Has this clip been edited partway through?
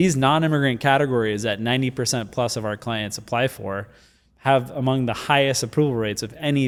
no; 0 cuts

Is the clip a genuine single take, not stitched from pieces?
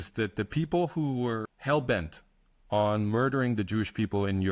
no; 1 cut; at 1.5 s

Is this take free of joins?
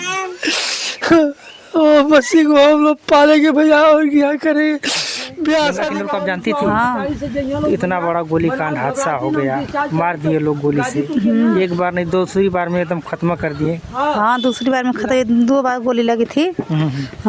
no; 1 cut; at 5.8 s

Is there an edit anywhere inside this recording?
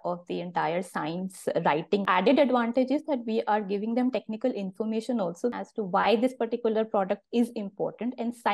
yes; 2 cuts; at 2.0 s, 5.5 s

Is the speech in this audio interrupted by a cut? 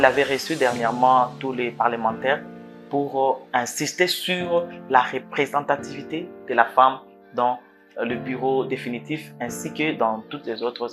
no; 0 cuts

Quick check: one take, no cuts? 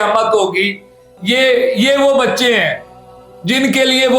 yes; 0 cuts

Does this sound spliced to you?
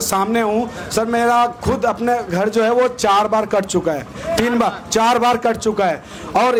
no; 0 cuts

